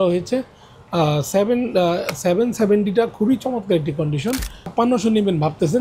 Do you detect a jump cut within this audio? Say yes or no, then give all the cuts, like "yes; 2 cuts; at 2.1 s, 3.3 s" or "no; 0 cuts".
yes; 1 cut; at 4.6 s